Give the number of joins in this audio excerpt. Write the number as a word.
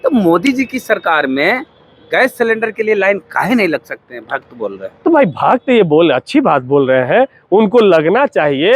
zero